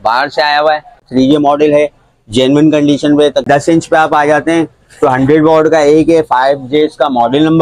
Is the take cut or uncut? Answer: cut